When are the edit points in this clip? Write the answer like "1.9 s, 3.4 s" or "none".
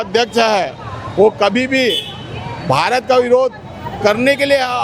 none